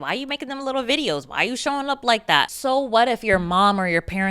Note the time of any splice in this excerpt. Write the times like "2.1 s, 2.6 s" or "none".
2.5 s